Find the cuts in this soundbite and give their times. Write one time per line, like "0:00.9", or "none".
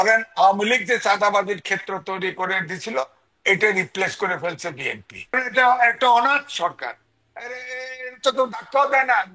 0:05.4